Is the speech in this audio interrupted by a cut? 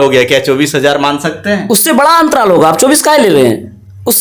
no; 0 cuts

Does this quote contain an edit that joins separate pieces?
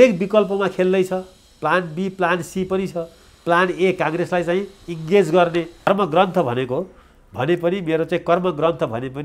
yes; 1 cut; at 5.9 s

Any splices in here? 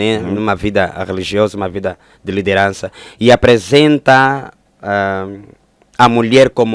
no; 0 cuts

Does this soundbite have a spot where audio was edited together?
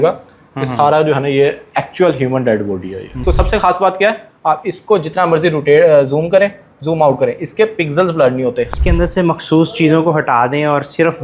yes; 2 cuts; at 3.2 s, 8.7 s

